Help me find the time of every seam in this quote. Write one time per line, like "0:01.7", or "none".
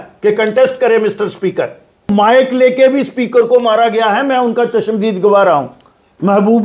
0:02.1